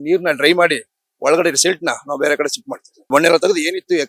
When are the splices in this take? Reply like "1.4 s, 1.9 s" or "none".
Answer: 3.1 s